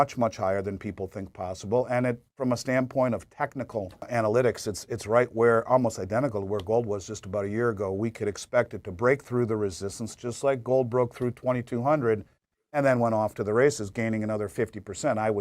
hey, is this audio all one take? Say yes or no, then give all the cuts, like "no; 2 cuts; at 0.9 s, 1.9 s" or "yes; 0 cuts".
no; 1 cut; at 4.1 s